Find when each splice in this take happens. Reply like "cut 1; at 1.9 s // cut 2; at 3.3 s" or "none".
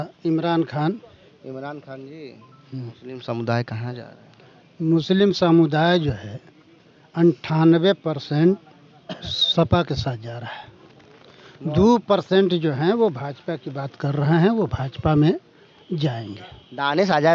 none